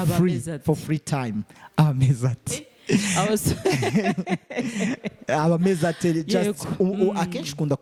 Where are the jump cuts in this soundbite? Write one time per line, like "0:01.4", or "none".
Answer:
none